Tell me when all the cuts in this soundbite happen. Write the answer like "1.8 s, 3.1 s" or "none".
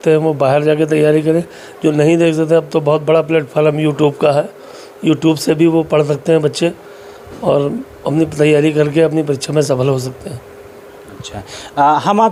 none